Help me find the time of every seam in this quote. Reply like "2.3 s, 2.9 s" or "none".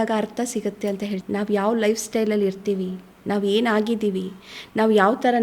1.2 s